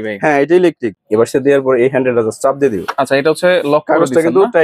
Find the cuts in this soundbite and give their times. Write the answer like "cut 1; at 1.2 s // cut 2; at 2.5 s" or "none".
cut 1; at 0.9 s